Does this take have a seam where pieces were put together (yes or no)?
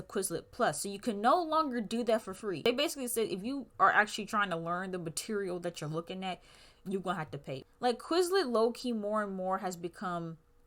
yes